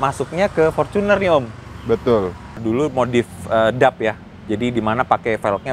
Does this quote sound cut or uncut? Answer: cut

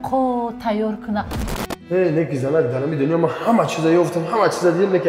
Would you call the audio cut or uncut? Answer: cut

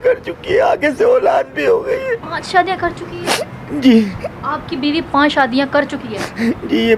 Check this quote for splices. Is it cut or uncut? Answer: uncut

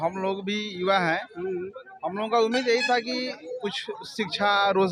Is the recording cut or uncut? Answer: uncut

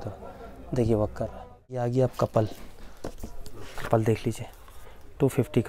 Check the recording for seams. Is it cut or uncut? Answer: cut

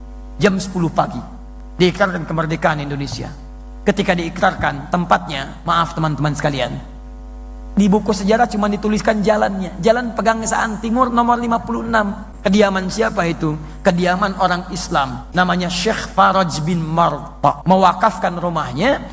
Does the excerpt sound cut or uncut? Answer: cut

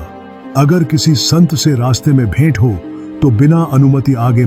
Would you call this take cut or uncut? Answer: uncut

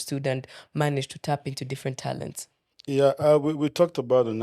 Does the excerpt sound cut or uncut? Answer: uncut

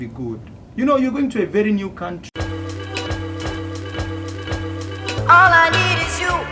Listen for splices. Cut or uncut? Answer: cut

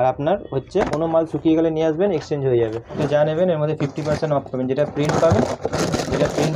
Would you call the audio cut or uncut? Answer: cut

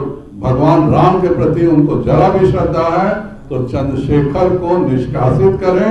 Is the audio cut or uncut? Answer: uncut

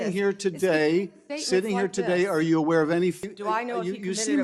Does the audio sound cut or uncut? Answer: cut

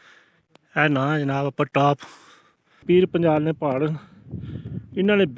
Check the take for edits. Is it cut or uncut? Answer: cut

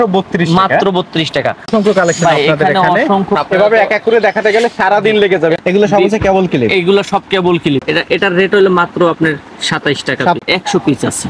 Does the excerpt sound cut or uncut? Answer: cut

